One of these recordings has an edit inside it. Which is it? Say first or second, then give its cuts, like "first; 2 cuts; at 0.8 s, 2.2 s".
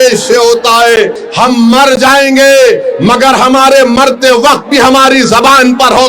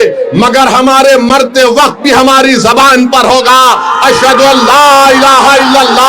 first; 1 cut; at 1.2 s